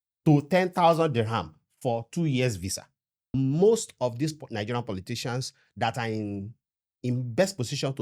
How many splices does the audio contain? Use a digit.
1